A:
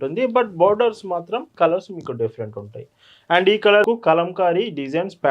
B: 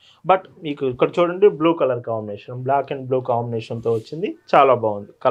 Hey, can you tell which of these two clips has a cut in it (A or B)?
A